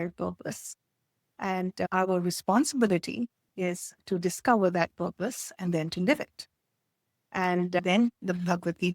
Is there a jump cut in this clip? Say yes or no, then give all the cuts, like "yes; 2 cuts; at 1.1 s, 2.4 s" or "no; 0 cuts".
yes; 2 cuts; at 1.9 s, 7.8 s